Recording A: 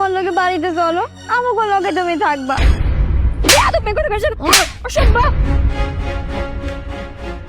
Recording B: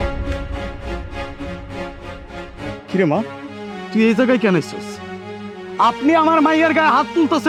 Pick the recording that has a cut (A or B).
A